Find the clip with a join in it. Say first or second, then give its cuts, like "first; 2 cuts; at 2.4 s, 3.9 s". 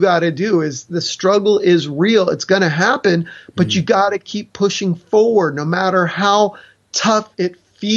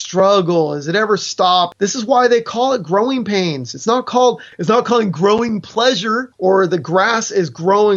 second; 3 cuts; at 1.7 s, 4.5 s, 6.3 s